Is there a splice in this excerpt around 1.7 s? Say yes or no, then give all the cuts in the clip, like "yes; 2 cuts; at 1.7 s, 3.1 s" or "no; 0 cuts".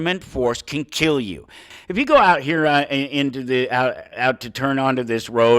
yes; 1 cut; at 1.7 s